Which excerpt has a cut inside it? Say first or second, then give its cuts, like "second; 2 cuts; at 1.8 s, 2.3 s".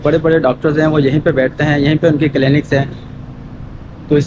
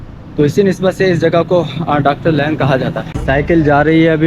second; 1 cut; at 3.2 s